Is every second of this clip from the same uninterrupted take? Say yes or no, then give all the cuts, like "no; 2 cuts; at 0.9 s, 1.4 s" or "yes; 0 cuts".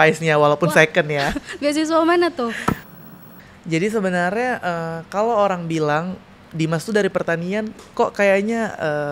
no; 1 cut; at 2.9 s